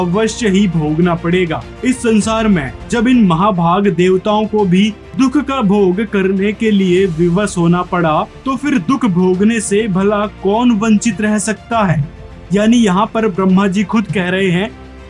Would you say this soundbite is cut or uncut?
uncut